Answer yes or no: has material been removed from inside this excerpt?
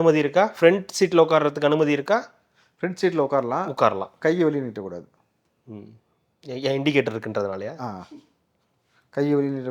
no